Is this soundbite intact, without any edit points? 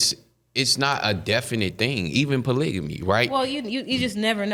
yes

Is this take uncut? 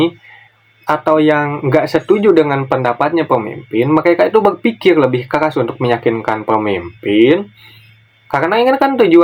yes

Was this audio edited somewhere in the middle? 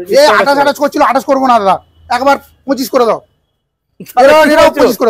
no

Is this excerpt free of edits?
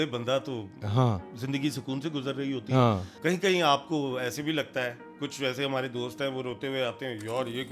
no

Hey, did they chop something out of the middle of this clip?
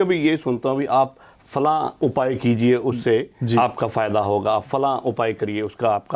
no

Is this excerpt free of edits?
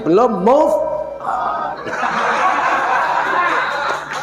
yes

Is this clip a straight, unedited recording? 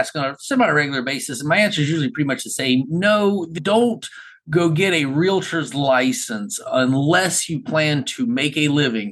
yes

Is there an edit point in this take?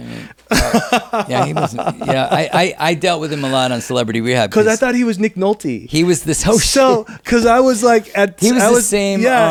no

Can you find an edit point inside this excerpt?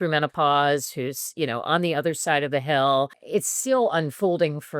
yes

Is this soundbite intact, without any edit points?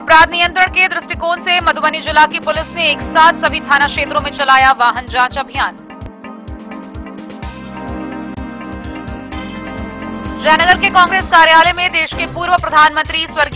yes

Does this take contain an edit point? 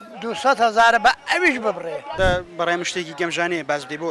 yes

